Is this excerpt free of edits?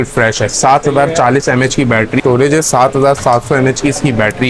no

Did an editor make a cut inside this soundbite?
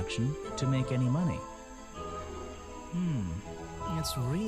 yes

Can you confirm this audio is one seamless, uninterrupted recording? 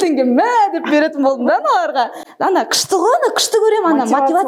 yes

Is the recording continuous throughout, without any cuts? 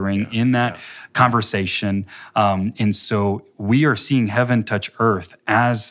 yes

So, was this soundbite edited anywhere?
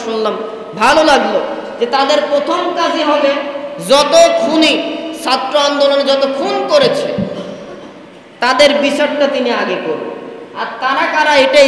no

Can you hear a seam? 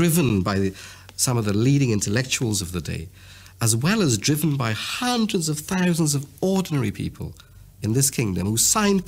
no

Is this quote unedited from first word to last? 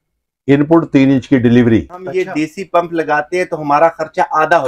no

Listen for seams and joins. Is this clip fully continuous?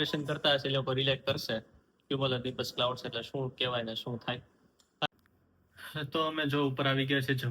no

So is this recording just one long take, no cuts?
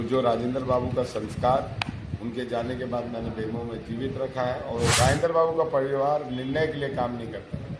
no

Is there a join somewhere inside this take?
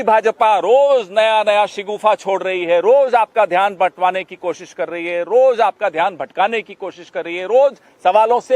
no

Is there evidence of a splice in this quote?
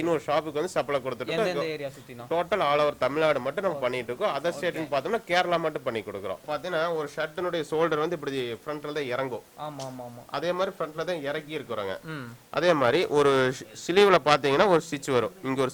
yes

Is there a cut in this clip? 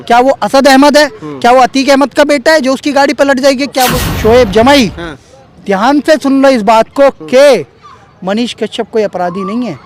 yes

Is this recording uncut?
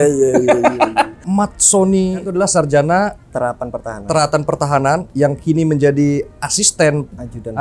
no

